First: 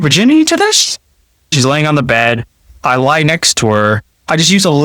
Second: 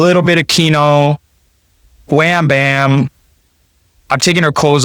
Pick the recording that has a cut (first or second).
first